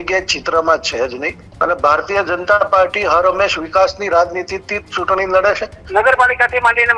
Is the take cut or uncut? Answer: cut